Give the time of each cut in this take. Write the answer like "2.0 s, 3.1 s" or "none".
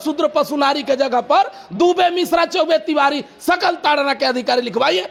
none